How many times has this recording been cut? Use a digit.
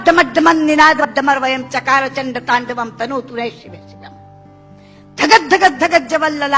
3